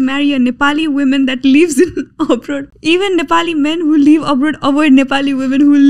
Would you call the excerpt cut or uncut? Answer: cut